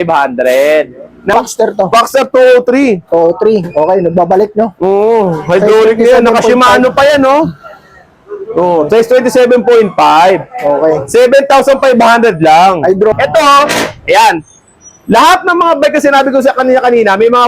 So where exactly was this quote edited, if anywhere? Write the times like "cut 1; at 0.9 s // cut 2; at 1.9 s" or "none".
cut 1; at 1.3 s // cut 2; at 13.1 s